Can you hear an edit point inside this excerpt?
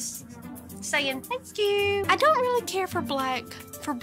no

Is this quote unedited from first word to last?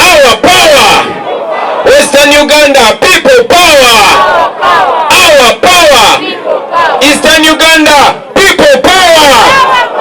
yes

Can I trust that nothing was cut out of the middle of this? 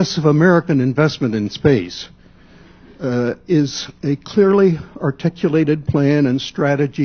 yes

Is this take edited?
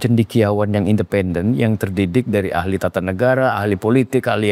no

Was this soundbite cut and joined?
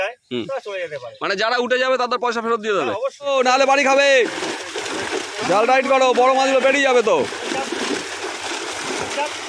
yes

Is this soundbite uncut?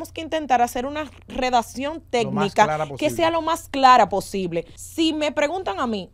no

